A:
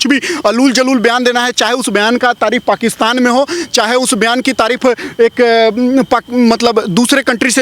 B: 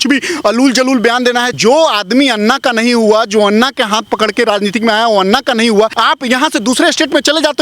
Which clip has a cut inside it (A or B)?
B